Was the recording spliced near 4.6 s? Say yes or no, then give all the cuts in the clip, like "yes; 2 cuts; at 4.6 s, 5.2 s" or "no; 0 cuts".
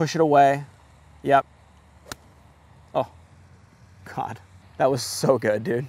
yes; 1 cut; at 4.6 s